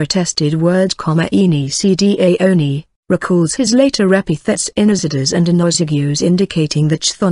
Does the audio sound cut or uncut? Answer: uncut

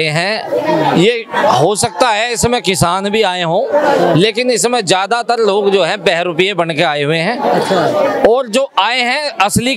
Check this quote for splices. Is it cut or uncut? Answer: uncut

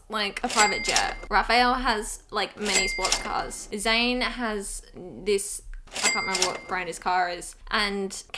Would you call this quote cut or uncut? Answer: cut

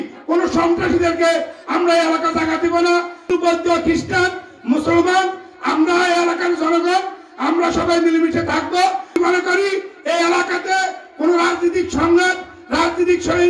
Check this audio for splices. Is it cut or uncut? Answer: cut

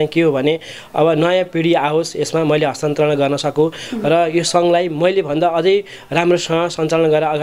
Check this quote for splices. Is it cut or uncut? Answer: uncut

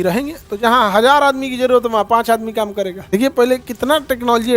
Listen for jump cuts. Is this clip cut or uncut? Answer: cut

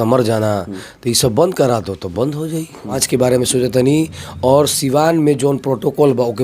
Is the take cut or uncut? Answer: cut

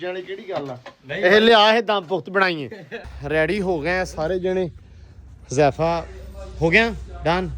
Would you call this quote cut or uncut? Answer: cut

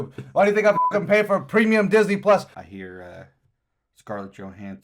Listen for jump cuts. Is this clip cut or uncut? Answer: cut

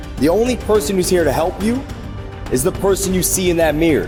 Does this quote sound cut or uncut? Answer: uncut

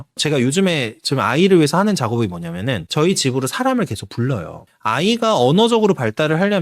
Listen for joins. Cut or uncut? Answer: cut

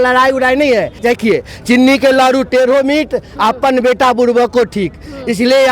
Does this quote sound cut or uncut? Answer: cut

